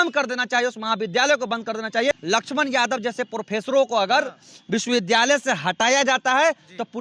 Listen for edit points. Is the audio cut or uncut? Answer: cut